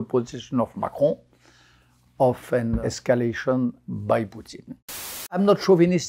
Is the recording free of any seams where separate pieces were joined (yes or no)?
no